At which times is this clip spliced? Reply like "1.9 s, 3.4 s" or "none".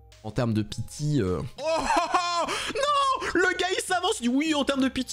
1.5 s